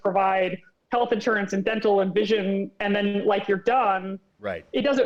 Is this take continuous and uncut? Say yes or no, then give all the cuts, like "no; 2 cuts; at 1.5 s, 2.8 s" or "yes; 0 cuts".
yes; 0 cuts